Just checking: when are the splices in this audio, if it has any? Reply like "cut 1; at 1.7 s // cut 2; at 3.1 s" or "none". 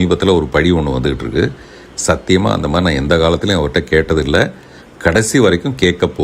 none